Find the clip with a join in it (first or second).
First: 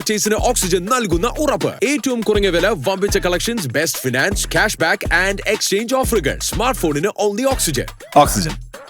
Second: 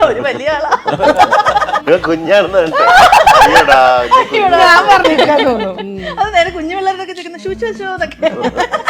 second